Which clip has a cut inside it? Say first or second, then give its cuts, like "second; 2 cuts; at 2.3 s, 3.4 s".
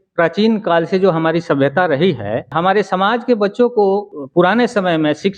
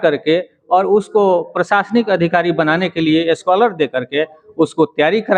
first; 2 cuts; at 2.5 s, 4.2 s